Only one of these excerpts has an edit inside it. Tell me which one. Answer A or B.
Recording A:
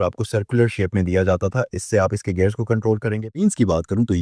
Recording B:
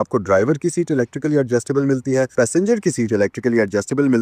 A